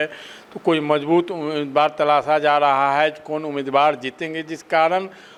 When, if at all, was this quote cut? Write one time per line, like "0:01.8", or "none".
none